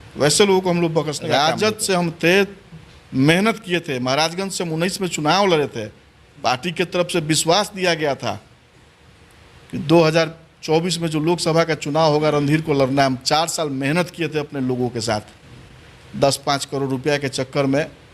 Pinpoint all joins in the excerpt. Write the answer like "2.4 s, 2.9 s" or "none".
1.3 s